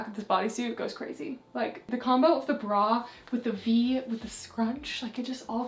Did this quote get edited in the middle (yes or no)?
no